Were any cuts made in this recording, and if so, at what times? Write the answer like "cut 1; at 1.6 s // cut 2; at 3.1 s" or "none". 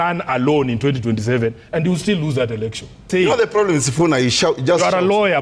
cut 1; at 3.1 s